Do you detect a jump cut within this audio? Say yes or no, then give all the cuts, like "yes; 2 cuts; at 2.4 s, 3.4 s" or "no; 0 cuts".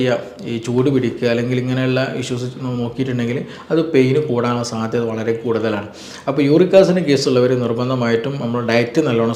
no; 0 cuts